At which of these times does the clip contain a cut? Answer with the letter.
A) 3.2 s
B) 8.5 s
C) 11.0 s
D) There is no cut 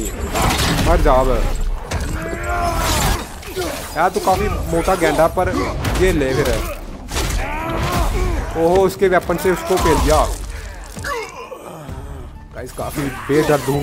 A